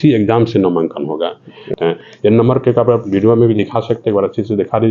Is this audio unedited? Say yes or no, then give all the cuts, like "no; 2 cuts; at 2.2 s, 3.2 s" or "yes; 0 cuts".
no; 1 cut; at 1.7 s